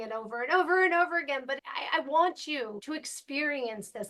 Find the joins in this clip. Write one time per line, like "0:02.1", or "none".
0:02.8